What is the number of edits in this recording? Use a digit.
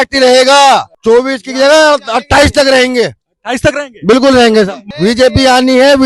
2